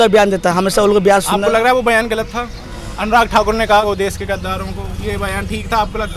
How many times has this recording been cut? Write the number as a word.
zero